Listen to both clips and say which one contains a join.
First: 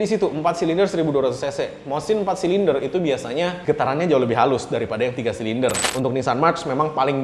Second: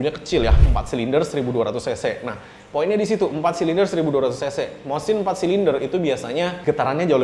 first; 1 cut; at 5.8 s

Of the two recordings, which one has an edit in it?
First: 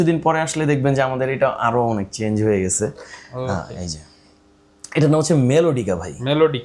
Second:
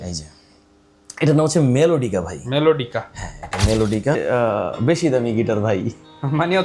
second; 1 cut; at 4.2 s

